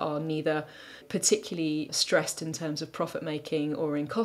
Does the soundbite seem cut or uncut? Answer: cut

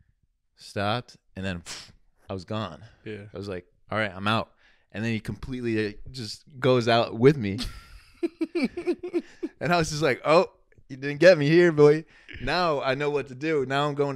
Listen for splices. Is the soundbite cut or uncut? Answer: uncut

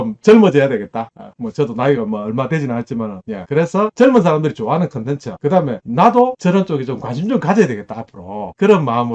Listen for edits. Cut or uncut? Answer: uncut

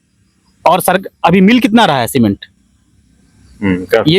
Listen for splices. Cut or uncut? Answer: uncut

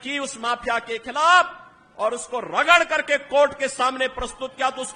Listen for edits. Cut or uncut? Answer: uncut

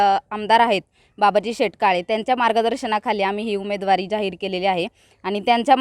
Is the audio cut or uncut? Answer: uncut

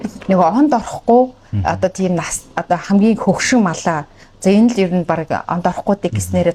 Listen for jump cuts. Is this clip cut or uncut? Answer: uncut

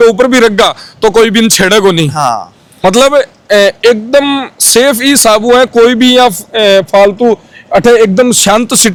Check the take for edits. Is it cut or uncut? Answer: uncut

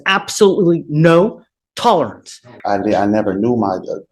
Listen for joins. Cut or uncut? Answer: cut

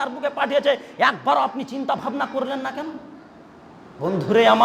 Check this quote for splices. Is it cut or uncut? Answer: uncut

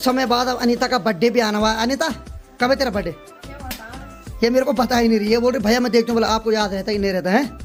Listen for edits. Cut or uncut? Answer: uncut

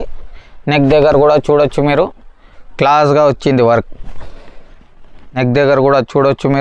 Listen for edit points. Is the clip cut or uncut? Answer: cut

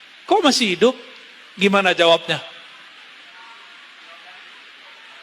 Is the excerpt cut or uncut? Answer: uncut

